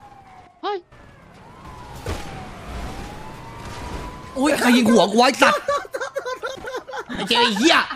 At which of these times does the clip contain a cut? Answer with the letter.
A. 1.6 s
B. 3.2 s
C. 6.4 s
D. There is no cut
A